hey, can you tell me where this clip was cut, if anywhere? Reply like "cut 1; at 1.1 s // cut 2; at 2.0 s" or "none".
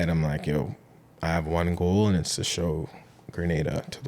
none

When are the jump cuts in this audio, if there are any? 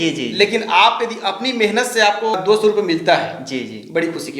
cut 1; at 2.3 s

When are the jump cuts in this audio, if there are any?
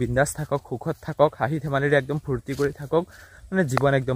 none

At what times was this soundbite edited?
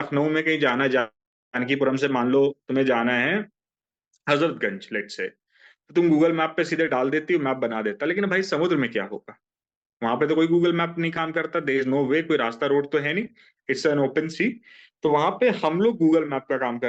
none

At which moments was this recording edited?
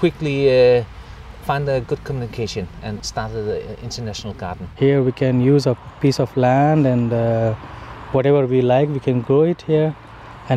cut 1; at 4.7 s

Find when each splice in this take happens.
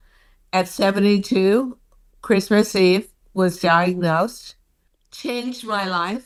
none

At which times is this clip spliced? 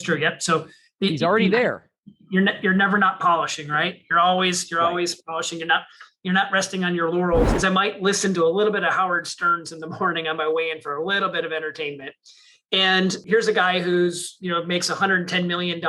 cut 1; at 7.5 s

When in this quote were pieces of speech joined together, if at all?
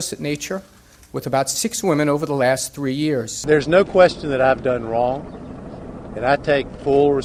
none

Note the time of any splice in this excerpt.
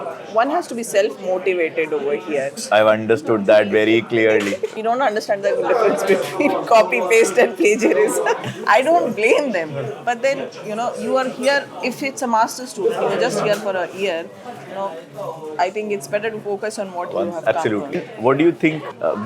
cut 1; at 2.6 s // cut 2; at 4.7 s // cut 3; at 8.5 s // cut 4; at 18.0 s

